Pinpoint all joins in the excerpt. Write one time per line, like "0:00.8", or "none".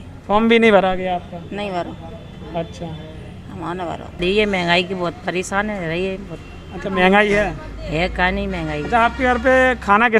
0:04.2